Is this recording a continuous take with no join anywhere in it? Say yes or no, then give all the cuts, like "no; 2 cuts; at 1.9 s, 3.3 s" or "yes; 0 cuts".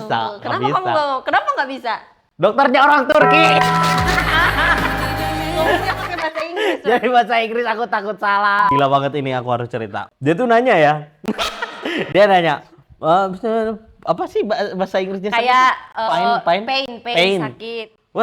no; 2 cuts; at 8.7 s, 10.1 s